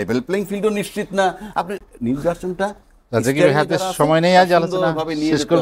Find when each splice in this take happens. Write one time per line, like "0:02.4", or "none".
none